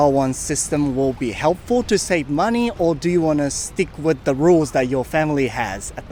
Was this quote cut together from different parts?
no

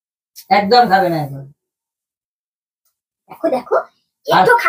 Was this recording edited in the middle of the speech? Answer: no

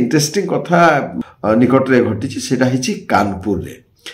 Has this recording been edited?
yes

